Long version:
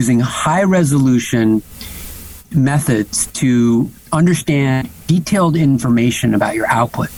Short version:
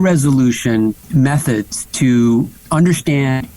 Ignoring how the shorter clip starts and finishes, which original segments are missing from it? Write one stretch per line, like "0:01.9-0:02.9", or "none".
0:01.7-0:02.4

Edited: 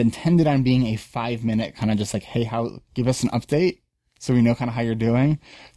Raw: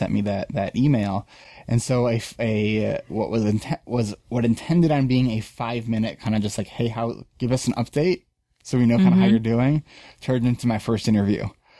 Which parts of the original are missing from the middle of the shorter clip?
none

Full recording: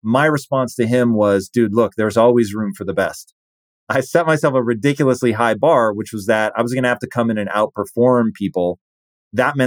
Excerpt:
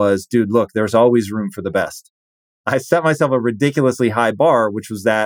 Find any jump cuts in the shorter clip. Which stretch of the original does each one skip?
none

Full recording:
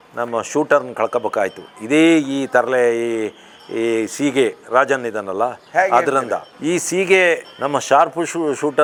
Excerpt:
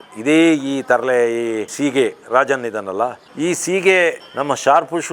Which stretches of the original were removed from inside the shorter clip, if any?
0:03.4-0:04.1
0:05.6-0:06.5

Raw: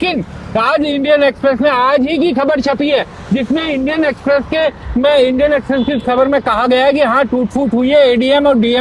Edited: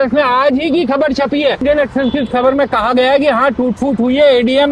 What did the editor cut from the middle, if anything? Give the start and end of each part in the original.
0:03.1-0:05.3

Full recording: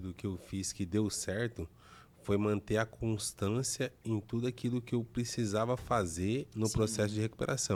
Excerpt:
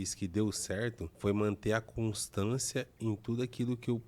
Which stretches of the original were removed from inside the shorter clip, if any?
0:01.6-0:02.1

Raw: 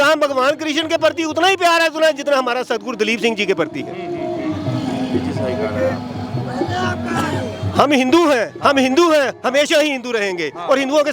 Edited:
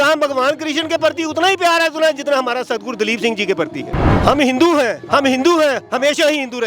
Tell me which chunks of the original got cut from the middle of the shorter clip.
0:04.0-0:07.6

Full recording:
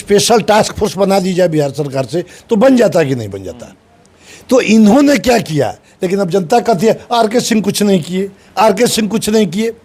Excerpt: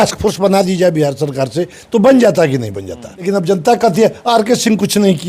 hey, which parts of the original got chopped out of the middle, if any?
0:03.6-0:05.9

